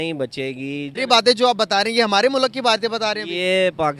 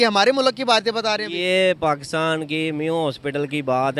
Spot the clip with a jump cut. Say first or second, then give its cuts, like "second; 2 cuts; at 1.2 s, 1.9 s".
first; 1 cut; at 0.9 s